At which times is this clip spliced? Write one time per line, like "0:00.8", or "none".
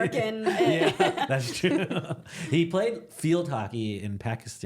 0:01.1